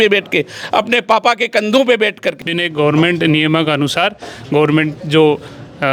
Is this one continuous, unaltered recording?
no; 1 cut; at 2.3 s

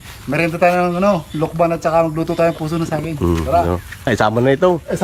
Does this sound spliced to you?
no; 0 cuts

